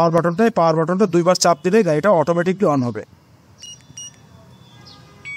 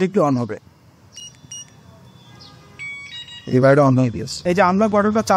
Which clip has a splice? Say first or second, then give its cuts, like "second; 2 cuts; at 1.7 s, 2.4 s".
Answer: second; 1 cut; at 4.3 s